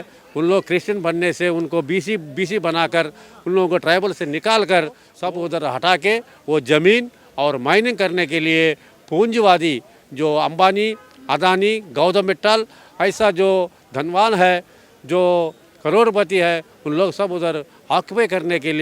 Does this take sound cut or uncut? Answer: cut